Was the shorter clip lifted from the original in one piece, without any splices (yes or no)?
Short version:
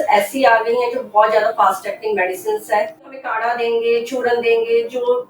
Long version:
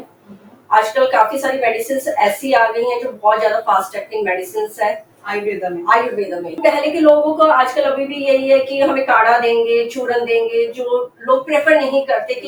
no